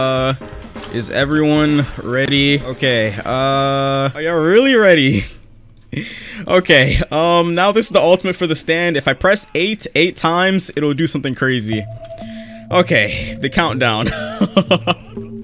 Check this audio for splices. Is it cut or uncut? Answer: uncut